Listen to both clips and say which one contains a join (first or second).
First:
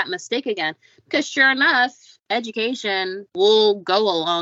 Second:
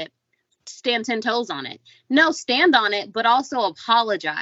first